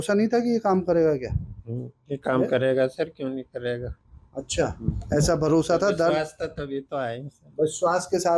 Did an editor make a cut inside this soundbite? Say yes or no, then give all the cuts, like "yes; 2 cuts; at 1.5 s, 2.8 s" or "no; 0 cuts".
no; 0 cuts